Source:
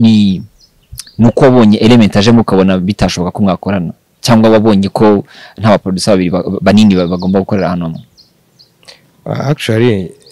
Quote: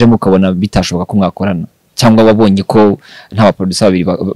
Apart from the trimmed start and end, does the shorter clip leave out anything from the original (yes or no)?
no